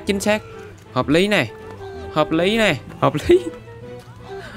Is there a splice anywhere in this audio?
yes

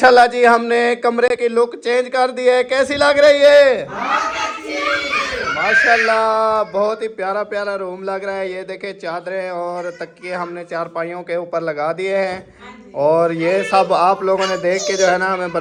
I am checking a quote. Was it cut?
no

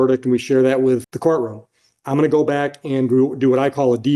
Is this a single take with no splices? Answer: no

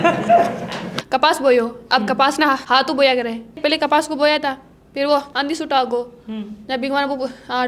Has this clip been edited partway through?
yes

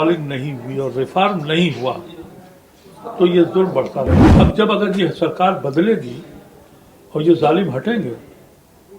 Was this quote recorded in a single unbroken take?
no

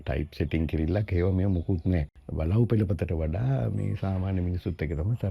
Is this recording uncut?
no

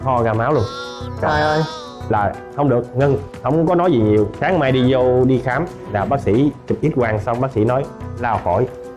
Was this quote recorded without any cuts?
yes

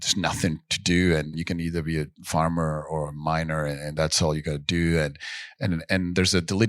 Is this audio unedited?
no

